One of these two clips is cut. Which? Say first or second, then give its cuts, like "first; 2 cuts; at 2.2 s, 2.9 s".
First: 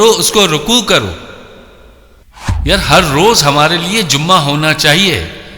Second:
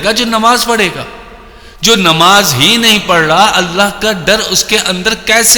first; 1 cut; at 2.1 s